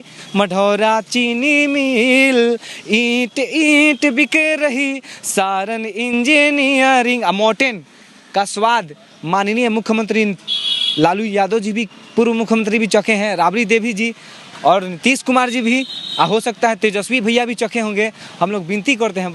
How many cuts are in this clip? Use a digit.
0